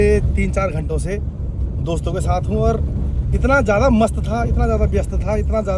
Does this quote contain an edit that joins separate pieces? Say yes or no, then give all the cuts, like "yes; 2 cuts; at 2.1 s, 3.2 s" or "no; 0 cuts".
no; 0 cuts